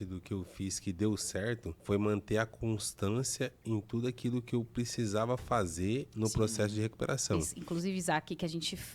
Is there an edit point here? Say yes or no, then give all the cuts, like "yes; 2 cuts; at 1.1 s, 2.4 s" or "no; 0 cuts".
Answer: yes; 2 cuts; at 1.7 s, 7.5 s